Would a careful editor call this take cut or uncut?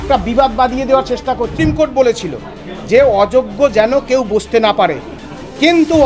cut